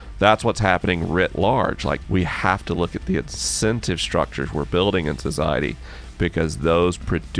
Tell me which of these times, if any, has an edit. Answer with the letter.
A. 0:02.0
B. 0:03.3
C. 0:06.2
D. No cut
A